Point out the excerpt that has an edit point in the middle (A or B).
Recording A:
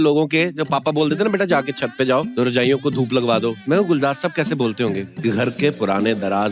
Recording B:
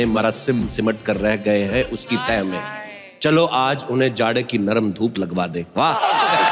A